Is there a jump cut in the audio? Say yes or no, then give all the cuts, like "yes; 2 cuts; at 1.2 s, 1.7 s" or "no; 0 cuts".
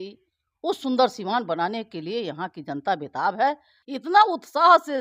yes; 1 cut; at 3.7 s